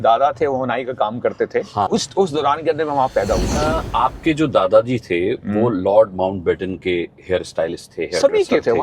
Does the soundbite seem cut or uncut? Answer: cut